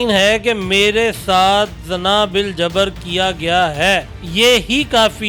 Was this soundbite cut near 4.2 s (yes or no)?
yes